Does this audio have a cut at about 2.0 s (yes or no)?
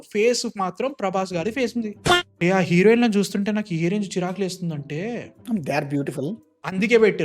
yes